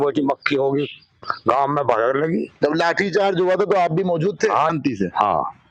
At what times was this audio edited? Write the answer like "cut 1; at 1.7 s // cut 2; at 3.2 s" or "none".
cut 1; at 4.7 s

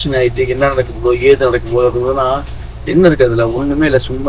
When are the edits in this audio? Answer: none

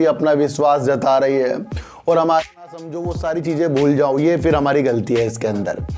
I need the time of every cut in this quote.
cut 1; at 2.5 s

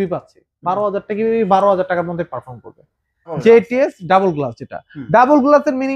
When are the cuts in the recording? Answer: cut 1; at 3.3 s

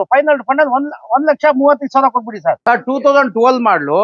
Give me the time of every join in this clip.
cut 1; at 2.6 s

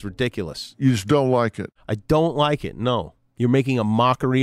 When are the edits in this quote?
cut 1; at 3.2 s

